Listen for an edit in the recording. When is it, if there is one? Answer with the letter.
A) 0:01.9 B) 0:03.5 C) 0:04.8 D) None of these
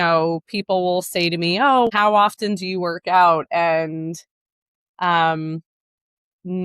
A